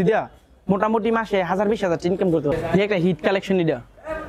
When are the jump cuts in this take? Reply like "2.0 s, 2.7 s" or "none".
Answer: 2.5 s

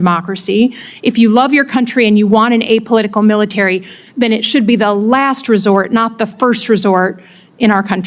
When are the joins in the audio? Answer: none

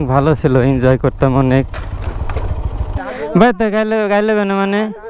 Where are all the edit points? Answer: 3.0 s

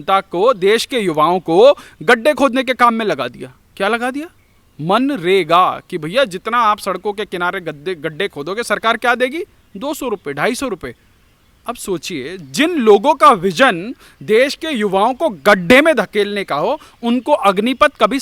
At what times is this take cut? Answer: none

